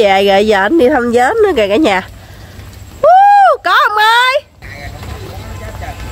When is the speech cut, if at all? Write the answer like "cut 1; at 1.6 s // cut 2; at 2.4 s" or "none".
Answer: cut 1; at 4.6 s